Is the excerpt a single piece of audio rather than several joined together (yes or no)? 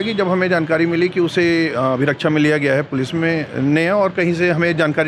yes